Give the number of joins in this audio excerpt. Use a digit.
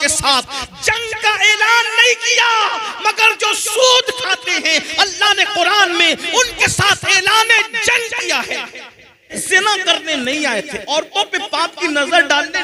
1